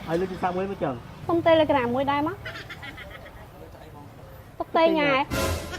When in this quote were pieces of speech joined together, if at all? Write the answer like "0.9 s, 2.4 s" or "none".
1.1 s